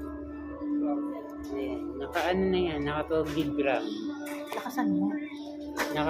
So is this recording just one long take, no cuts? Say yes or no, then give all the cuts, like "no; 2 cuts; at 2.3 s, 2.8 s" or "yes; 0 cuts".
yes; 0 cuts